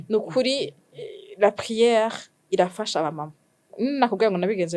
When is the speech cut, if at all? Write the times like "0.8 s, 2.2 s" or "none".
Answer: 3.7 s